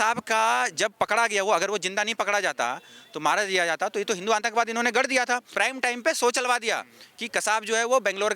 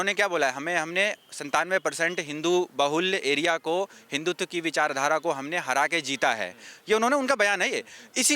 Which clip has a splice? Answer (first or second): first